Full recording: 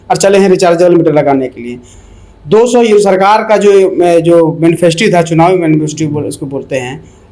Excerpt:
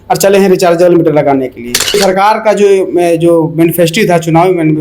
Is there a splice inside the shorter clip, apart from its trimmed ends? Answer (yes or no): yes